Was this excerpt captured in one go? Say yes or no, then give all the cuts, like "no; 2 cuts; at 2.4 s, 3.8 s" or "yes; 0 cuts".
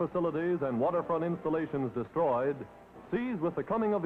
yes; 0 cuts